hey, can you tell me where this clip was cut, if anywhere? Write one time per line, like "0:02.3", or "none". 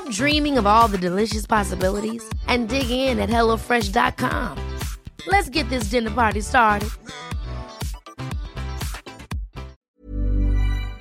0:09.8